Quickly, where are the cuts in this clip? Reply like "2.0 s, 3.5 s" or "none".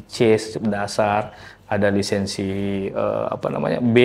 none